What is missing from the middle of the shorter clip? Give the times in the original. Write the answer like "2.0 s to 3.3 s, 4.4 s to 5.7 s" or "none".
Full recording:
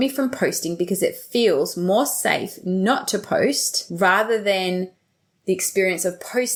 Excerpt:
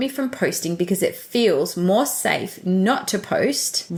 none